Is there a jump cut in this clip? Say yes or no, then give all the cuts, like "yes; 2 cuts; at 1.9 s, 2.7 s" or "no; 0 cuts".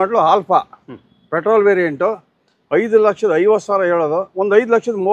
no; 0 cuts